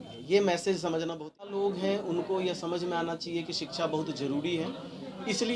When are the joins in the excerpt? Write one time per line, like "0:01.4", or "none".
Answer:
0:01.5

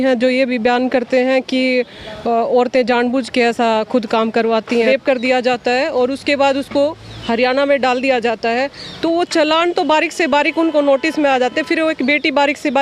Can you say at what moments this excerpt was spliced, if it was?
0:04.9

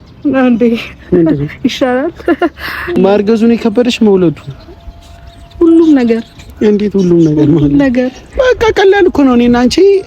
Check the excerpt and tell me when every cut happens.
0:02.9

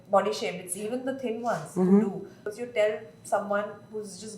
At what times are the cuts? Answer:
0:02.4

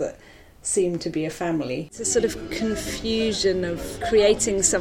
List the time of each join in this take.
0:02.0
0:03.9

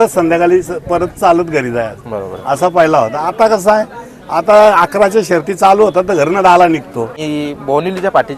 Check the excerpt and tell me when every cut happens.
0:07.2

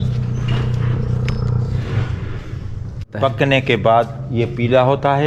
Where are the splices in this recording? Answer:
0:03.1

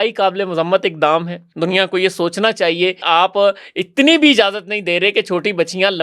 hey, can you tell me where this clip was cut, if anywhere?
0:01.4
0:03.0

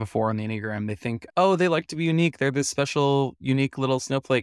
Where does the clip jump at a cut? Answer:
0:01.2

